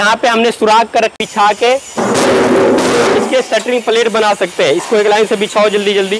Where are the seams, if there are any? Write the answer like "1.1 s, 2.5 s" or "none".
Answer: 1.2 s